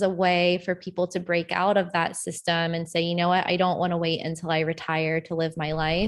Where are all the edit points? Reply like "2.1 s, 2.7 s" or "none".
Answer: none